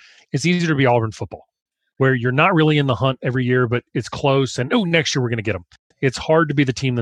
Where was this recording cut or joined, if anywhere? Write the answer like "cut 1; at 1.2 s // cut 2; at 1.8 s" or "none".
cut 1; at 5.8 s